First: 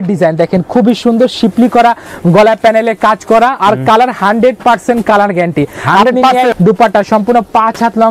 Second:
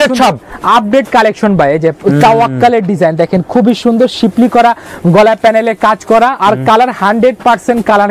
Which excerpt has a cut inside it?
first; 1 cut; at 6.5 s

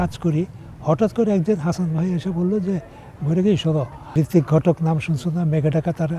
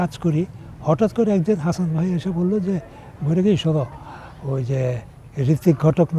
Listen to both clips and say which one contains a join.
first; 1 cut; at 4.0 s

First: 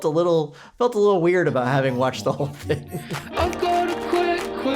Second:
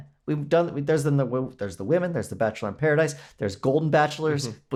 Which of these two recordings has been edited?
first; 1 cut; at 3.2 s

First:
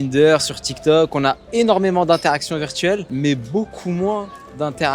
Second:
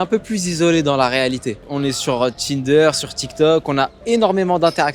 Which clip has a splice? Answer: second; 1 cut; at 1.6 s

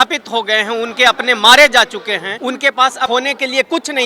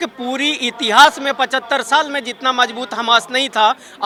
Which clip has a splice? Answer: first; 2 cuts; at 2.3 s, 3.1 s

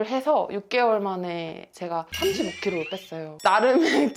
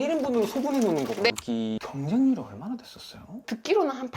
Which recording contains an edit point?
second; 1 cut; at 1.3 s

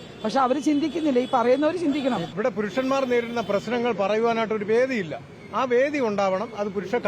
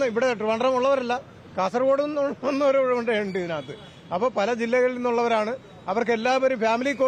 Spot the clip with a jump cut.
first; 1 cut; at 2.3 s

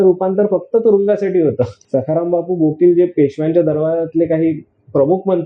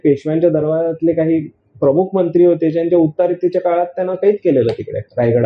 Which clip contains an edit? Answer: first; 1 cut; at 1.8 s

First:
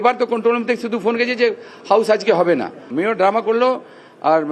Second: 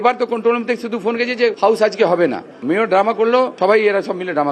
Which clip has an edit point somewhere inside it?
second; 2 cuts; at 1.6 s, 3.5 s

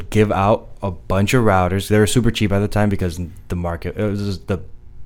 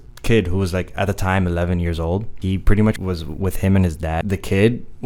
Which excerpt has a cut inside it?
second; 3 cuts; at 2.3 s, 3.0 s, 4.2 s

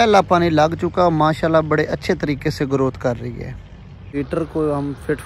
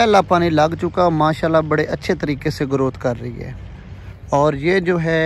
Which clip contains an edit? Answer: first; 1 cut; at 4.1 s

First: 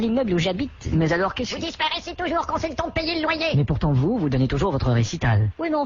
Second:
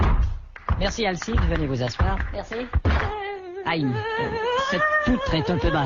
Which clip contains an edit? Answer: first; 1 cut; at 1.8 s

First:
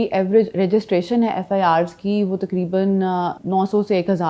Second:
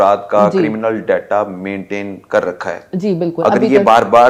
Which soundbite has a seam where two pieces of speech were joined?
first; 1 cut; at 3.4 s

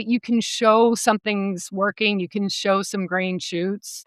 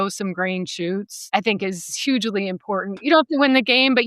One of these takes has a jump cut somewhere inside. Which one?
second; 1 cut; at 3.0 s

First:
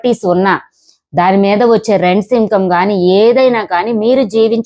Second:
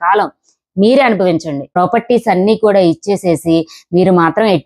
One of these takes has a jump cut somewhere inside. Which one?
second; 1 cut; at 1.7 s

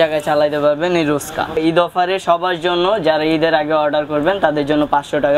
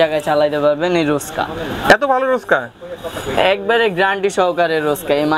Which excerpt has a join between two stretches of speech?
first; 1 cut; at 1.6 s

